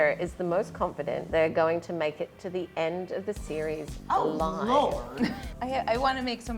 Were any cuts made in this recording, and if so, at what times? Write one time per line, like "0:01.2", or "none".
0:01.2
0:05.4